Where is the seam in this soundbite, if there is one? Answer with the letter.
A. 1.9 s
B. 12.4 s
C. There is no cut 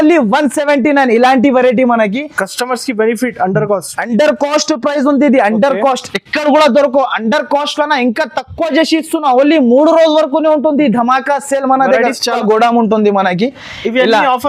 B